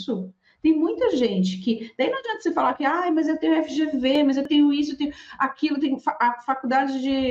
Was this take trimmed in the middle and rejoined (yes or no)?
yes